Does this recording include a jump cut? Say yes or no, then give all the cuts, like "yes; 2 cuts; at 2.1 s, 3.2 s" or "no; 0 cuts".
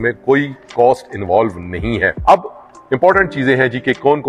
yes; 1 cut; at 2.2 s